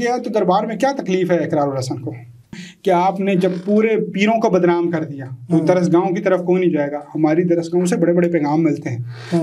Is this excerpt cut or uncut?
cut